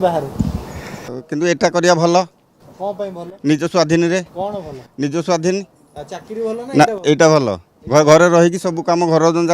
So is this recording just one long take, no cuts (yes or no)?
no